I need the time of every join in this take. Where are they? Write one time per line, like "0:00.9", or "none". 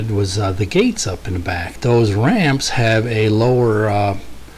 0:01.8